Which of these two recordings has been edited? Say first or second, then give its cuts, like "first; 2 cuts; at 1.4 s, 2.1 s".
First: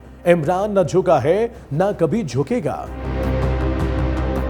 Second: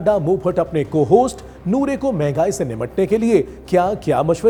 first; 1 cut; at 3.0 s